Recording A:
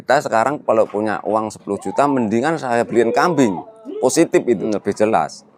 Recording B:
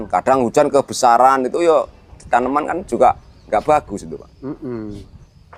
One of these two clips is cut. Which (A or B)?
A